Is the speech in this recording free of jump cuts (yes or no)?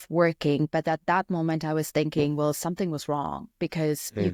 yes